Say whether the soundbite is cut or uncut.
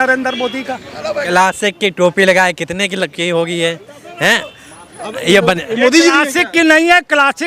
cut